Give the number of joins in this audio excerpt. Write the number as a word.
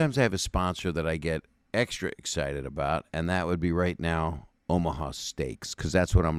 zero